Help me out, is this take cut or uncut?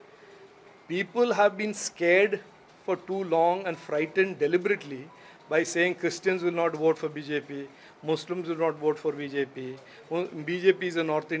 uncut